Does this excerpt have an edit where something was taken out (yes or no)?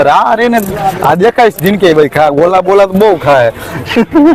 no